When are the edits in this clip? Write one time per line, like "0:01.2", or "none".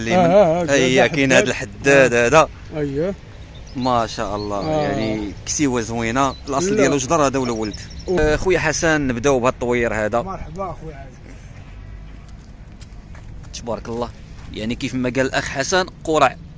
0:08.2